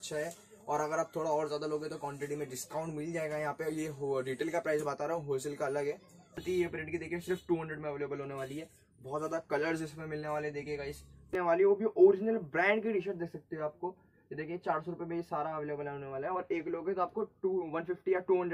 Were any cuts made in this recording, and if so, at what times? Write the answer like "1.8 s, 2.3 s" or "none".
6.4 s, 11.3 s